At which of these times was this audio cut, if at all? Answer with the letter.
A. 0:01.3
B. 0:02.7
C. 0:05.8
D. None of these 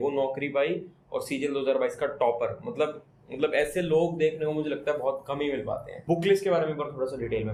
D